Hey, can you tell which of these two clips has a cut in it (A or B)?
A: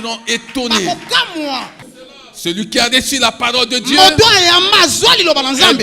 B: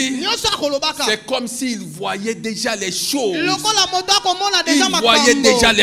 A